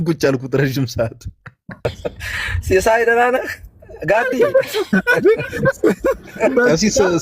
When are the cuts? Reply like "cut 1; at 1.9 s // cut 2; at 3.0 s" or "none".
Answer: cut 1; at 1.8 s